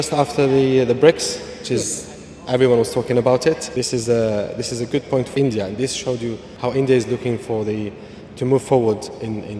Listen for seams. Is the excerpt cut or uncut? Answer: cut